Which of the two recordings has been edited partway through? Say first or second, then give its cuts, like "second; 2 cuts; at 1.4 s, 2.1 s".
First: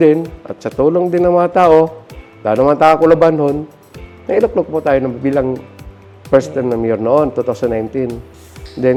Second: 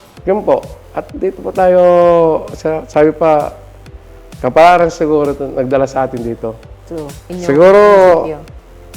second; 1 cut; at 7.3 s